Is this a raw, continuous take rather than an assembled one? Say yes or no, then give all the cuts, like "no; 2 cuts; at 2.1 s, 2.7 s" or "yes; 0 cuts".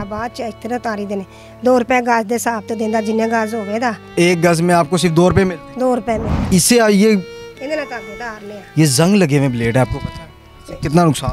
no; 2 cuts; at 4.0 s, 6.3 s